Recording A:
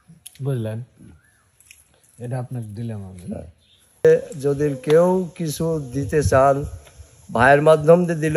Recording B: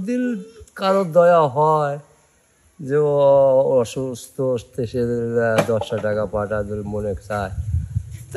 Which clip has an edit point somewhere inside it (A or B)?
A